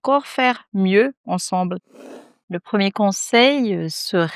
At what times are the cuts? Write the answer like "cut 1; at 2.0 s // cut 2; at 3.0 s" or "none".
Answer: cut 1; at 2.1 s